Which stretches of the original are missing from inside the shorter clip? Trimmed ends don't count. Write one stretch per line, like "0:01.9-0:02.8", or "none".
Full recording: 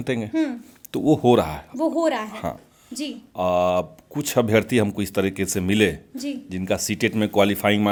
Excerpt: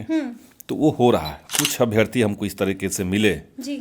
0:01.7-0:04.0